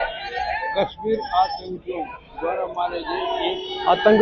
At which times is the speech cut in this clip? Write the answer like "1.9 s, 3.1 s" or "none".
none